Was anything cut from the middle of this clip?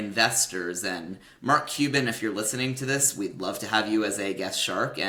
no; 0 cuts

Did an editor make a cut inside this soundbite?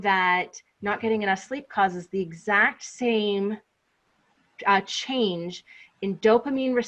no; 0 cuts

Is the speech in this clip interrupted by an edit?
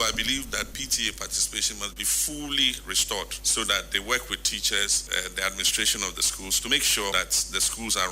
yes; 1 cut; at 5.0 s

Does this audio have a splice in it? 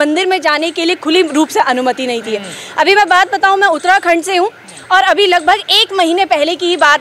no; 0 cuts

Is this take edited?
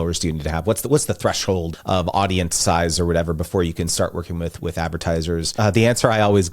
yes; 2 cuts; at 1.7 s, 5.5 s

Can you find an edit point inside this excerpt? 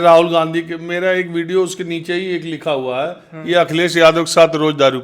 no; 0 cuts

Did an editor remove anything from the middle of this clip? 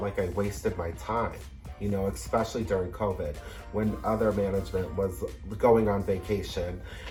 no; 0 cuts

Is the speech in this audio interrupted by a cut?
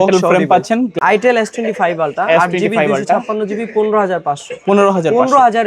yes; 1 cut; at 0.9 s

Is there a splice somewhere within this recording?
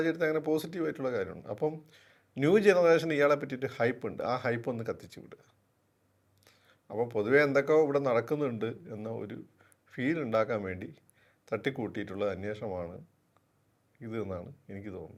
no; 0 cuts

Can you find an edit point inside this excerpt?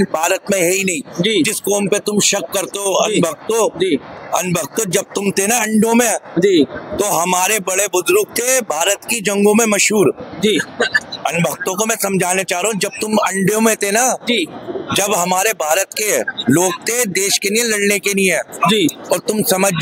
no; 0 cuts

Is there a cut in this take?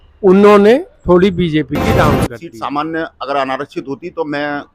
yes; 1 cut; at 2.2 s

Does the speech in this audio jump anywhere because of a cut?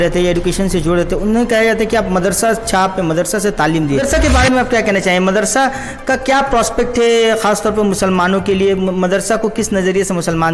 yes; 1 cut; at 4.0 s

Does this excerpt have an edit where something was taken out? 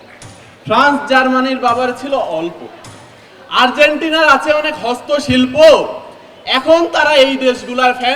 no; 0 cuts

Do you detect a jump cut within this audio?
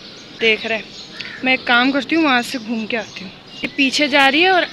yes; 1 cut; at 3.7 s

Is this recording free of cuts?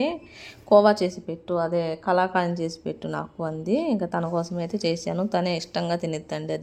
yes; 0 cuts

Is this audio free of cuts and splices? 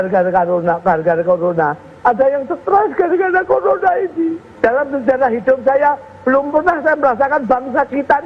no; 1 cut; at 4.4 s

